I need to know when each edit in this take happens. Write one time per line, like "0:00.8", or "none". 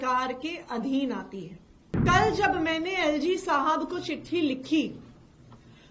0:02.0